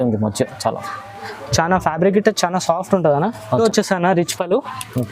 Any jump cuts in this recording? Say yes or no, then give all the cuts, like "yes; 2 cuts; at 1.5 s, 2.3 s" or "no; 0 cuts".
yes; 1 cut; at 3.6 s